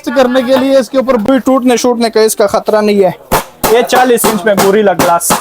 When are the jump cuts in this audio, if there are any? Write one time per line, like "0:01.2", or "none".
0:01.2